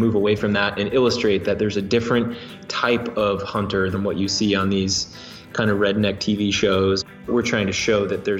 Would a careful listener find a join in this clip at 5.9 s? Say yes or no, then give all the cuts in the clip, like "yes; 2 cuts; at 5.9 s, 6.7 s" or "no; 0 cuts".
no; 2 cuts; at 3.9 s, 7.3 s